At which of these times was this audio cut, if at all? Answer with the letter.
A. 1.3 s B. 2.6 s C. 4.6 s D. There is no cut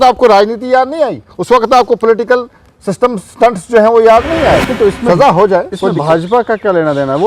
C